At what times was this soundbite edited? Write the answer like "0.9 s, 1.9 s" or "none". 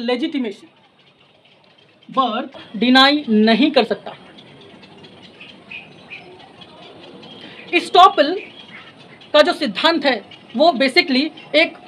2.7 s